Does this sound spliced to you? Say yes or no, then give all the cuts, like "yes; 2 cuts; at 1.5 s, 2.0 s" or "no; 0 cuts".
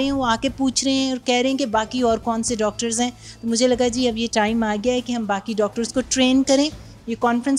no; 0 cuts